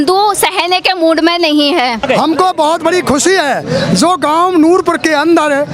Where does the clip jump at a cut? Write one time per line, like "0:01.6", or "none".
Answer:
0:02.0

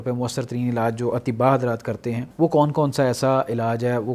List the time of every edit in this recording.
0:02.2

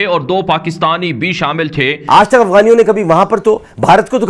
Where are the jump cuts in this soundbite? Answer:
0:02.0

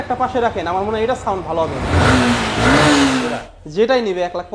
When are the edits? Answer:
0:03.4

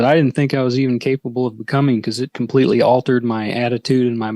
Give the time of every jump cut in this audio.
none

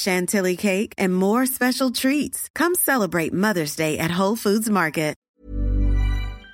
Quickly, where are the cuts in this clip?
0:05.3

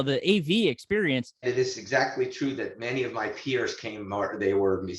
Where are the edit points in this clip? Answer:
0:01.4

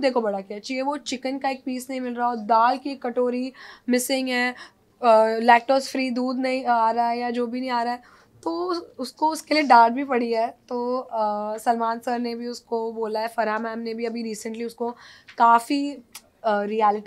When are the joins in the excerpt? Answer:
none

